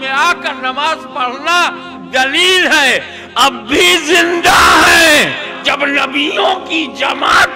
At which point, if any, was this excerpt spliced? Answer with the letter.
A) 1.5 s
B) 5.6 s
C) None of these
B